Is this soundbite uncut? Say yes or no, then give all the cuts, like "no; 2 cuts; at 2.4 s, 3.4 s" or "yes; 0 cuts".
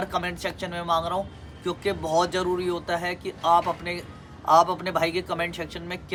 yes; 0 cuts